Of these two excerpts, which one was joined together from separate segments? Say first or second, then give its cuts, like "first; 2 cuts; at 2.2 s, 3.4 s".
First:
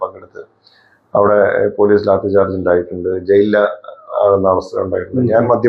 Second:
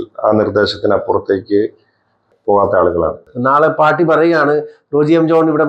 second; 2 cuts; at 2.3 s, 3.3 s